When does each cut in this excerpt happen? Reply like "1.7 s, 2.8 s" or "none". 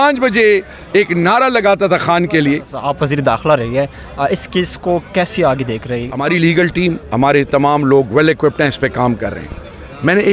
2.8 s, 6.0 s